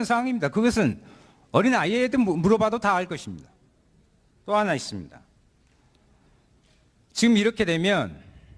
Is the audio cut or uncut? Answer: uncut